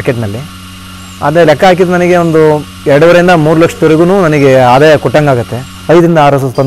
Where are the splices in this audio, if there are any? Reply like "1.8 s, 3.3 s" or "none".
5.7 s